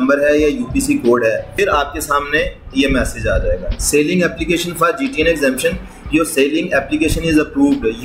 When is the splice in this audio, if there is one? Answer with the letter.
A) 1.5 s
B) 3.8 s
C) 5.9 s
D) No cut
A